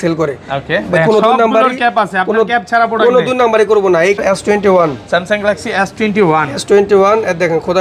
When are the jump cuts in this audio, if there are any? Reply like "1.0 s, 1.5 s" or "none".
4.2 s